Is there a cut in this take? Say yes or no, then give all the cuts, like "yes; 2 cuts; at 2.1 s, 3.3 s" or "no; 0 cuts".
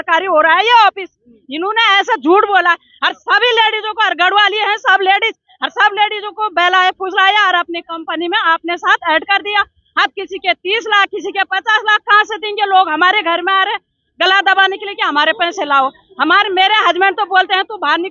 no; 0 cuts